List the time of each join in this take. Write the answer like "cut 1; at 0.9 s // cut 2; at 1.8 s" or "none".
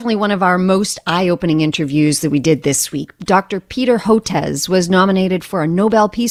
none